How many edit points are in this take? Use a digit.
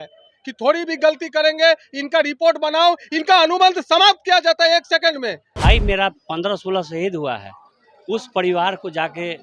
1